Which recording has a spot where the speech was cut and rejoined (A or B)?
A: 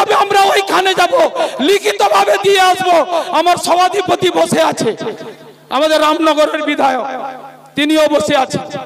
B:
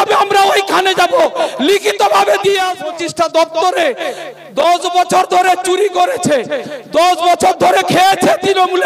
B